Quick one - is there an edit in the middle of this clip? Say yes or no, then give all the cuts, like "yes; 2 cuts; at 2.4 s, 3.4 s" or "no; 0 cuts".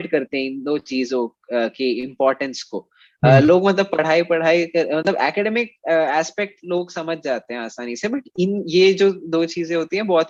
no; 0 cuts